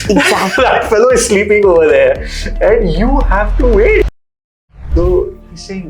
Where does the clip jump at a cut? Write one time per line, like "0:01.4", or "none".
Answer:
0:04.5

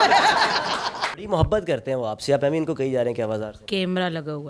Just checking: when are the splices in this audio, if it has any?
0:01.2
0:03.6

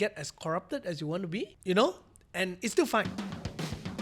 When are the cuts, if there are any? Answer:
0:01.6
0:03.1

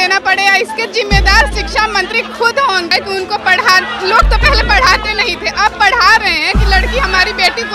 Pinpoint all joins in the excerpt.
0:02.9

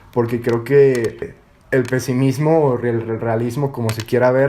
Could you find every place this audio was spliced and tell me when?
0:01.3

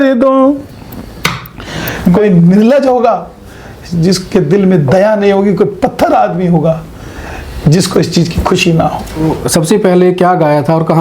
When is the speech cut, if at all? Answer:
0:02.2
0:09.2

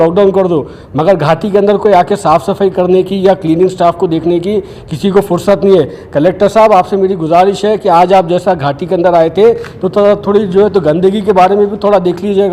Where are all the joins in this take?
none

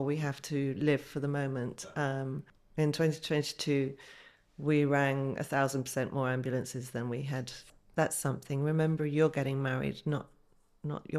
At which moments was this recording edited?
0:02.5
0:07.6

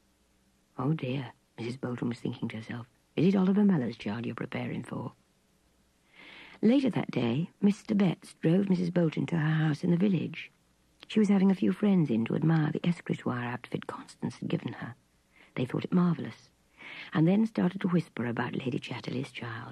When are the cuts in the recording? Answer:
none

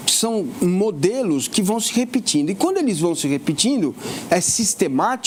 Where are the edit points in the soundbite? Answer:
none

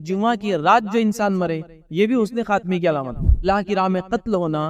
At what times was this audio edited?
0:03.4

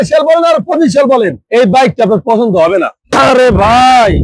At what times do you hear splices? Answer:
0:01.4
0:03.0

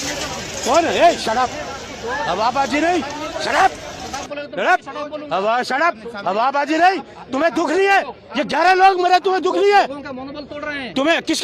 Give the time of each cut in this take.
none

